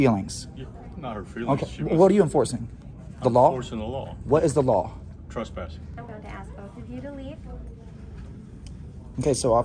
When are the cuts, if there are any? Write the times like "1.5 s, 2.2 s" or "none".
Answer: 6.0 s